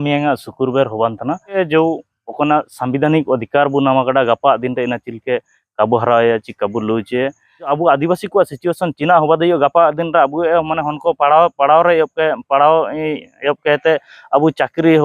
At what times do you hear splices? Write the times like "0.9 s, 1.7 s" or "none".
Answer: 1.5 s, 7.7 s